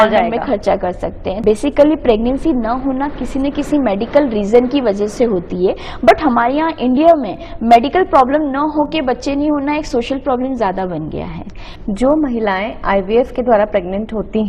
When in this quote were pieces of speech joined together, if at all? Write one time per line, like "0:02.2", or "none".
0:01.3
0:11.6